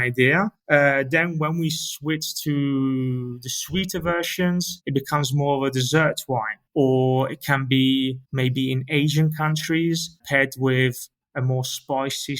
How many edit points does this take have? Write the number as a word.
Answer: three